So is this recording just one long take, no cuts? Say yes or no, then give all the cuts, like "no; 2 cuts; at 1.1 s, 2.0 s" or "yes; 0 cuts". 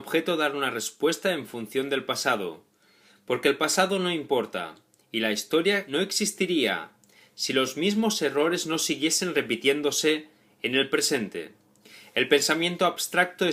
yes; 0 cuts